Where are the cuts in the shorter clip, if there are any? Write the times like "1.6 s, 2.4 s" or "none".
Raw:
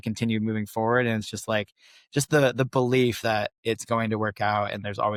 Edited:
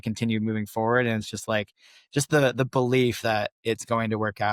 none